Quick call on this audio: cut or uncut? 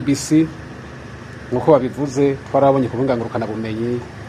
uncut